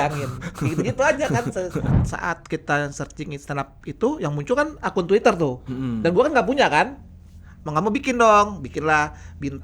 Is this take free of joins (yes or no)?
no